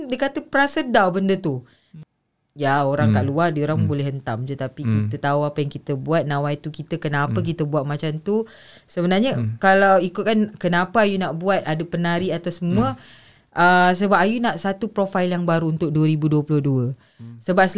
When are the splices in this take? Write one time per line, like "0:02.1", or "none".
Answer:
0:01.9

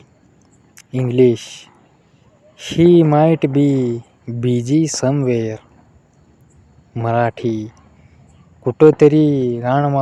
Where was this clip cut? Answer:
none

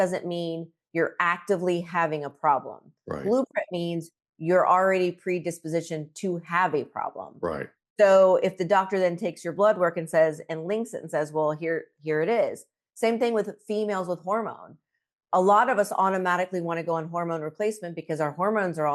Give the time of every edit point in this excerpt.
none

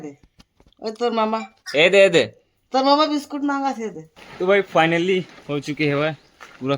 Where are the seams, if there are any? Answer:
0:04.2
0:05.4

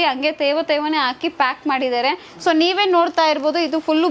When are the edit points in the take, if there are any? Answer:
none

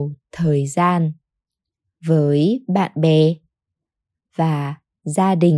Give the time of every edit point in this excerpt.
none

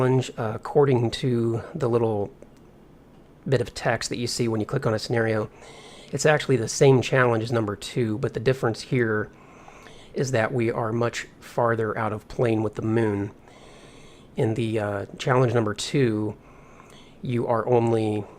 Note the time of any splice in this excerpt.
0:08.7

